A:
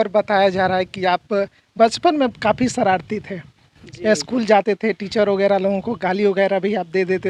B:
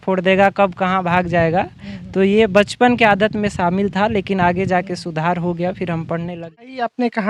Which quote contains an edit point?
B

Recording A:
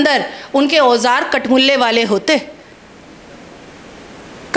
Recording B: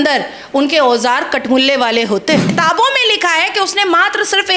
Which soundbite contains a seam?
B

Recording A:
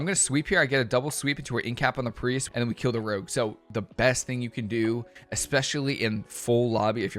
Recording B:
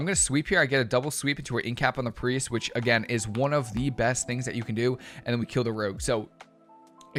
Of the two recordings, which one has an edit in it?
A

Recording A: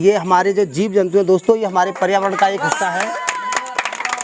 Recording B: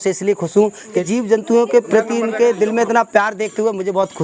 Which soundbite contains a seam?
B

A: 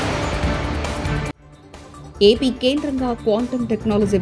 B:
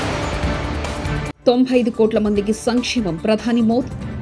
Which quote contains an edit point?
B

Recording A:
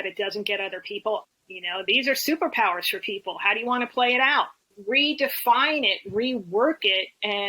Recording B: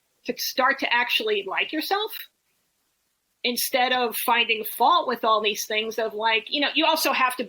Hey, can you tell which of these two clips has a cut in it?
A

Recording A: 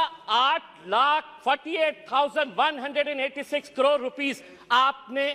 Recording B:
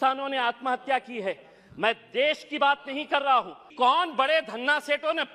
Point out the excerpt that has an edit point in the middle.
B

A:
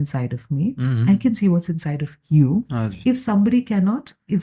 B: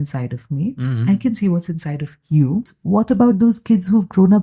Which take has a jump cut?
B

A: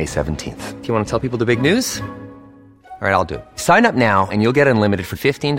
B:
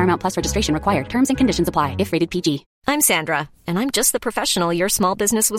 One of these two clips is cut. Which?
B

